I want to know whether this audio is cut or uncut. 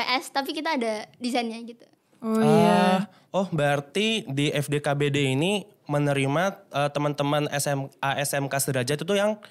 uncut